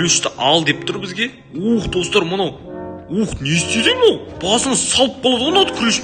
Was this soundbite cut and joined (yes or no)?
no